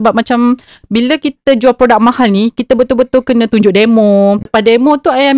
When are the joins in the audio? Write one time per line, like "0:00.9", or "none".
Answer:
0:04.5

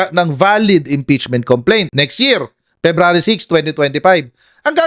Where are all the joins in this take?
none

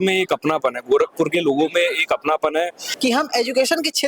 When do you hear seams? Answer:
0:02.8

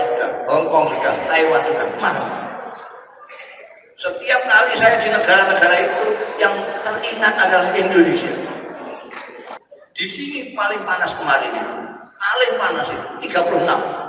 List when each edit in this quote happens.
0:09.5

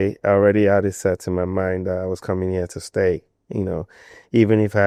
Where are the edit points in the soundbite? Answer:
none

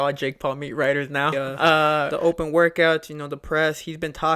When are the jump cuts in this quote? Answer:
0:02.1

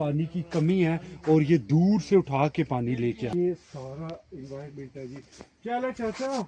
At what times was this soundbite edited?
0:03.3

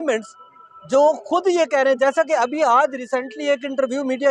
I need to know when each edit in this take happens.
none

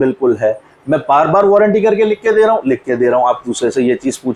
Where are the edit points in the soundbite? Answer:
none

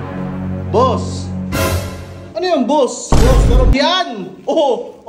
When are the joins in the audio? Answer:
0:03.7

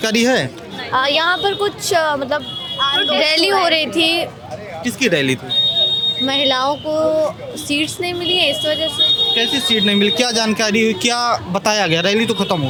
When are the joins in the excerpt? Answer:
none

